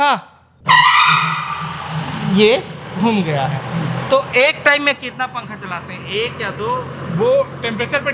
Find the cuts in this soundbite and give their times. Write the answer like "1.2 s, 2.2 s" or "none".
none